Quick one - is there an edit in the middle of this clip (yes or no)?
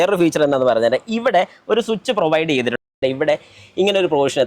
yes